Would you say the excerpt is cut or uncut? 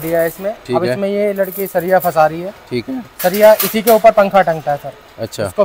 uncut